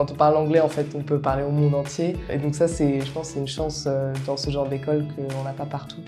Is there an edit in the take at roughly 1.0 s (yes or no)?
no